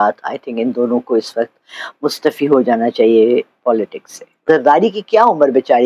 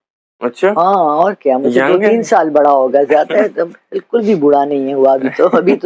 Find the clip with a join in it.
first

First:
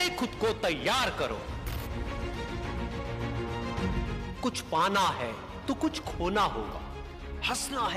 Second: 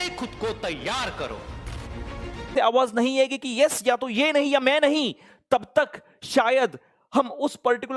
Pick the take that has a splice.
second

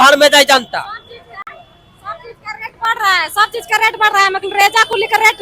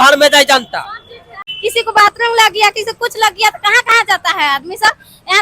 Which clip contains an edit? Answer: second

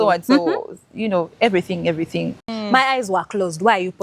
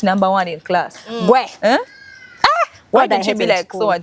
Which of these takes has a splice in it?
first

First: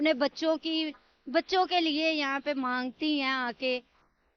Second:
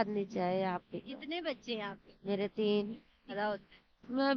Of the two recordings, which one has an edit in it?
second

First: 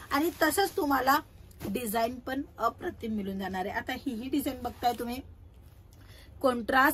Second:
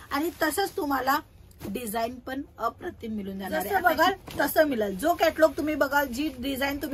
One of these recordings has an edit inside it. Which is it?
second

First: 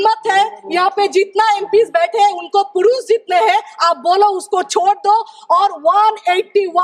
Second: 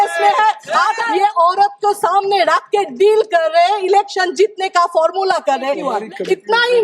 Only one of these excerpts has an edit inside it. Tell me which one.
second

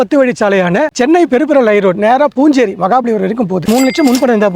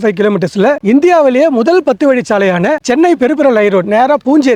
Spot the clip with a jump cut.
first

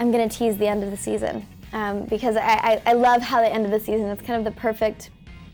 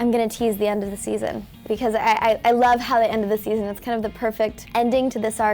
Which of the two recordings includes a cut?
second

